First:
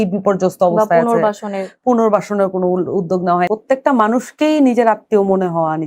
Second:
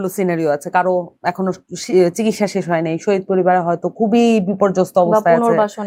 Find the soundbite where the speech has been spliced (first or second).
first